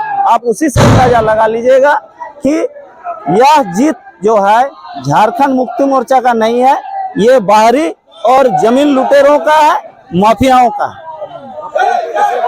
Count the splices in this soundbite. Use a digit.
0